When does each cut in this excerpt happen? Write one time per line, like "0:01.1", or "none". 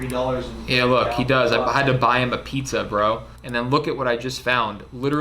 0:03.3

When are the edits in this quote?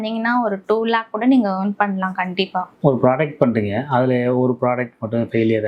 none

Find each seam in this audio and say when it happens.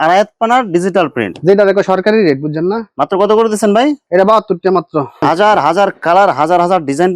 0:05.2

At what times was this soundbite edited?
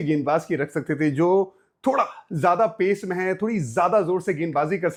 none

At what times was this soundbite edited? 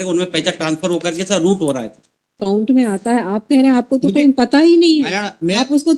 0:02.4

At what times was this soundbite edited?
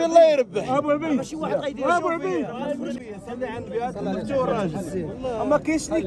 0:03.0

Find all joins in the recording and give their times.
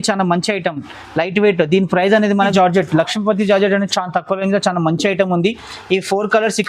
0:02.5

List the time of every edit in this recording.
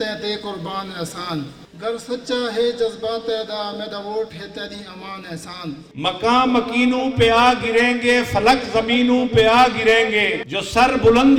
0:05.9

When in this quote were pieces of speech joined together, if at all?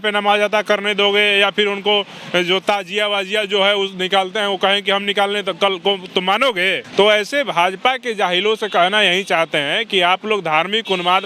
0:06.8

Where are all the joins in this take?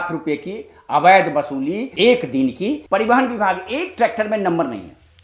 0:02.8

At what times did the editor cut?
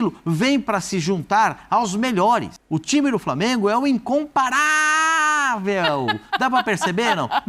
0:02.6

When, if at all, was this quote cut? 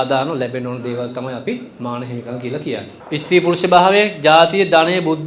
0:02.9

